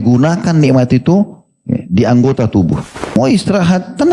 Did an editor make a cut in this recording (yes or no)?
yes